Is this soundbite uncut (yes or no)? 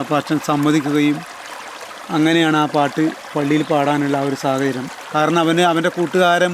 no